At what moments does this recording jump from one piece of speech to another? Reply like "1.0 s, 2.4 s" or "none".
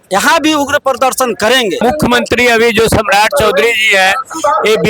1.8 s